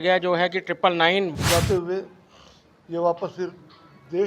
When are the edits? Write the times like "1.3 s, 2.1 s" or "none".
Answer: 1.3 s

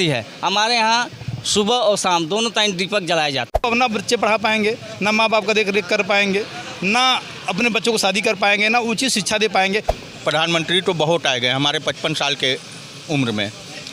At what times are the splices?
3.6 s, 9.9 s

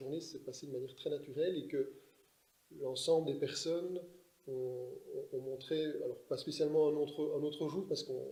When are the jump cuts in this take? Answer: none

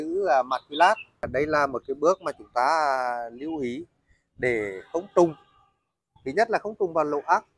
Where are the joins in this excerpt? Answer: 1.1 s

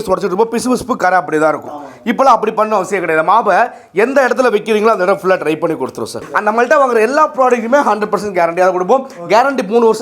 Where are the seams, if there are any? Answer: 6.2 s

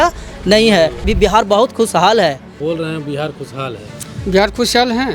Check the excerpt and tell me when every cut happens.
1.1 s, 2.5 s

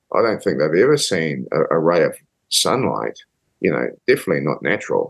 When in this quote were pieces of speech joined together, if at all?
none

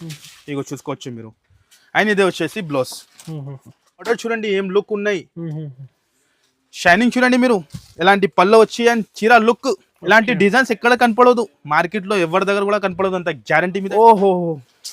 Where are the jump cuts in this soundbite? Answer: 4.1 s, 13.9 s

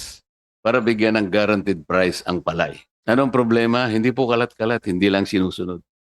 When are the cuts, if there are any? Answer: 2.9 s

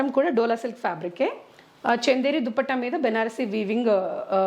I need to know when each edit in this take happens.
none

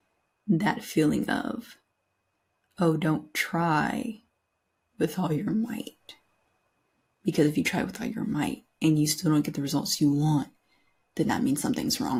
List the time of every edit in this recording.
none

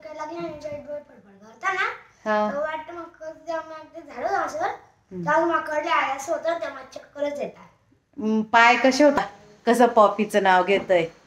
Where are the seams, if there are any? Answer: 9.2 s

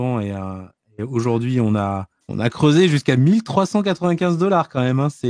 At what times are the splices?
2.2 s

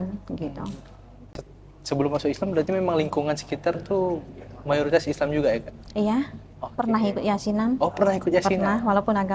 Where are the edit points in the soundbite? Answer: 1.3 s

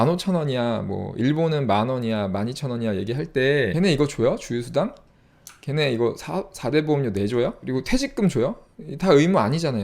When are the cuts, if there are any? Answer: 3.7 s, 7.6 s

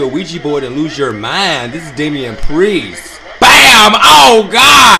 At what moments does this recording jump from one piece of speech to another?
none

